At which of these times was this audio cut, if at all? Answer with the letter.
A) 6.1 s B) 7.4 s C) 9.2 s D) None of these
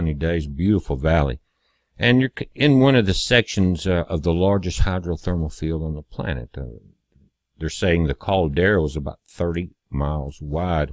C